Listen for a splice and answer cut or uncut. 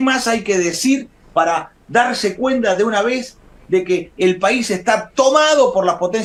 uncut